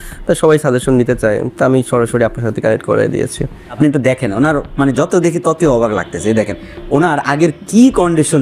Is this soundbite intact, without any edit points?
no; 1 cut; at 3.8 s

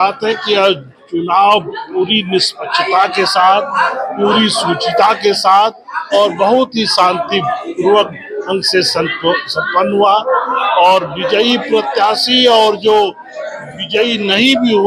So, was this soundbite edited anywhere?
no; 0 cuts

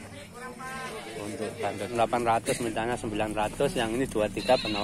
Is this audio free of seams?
no; 1 cut; at 1.9 s

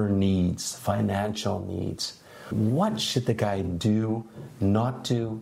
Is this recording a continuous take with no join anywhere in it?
no; 1 cut; at 2.5 s

